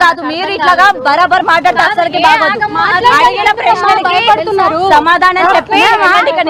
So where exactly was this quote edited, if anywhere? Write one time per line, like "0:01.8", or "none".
none